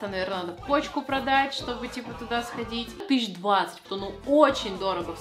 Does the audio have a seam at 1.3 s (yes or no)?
no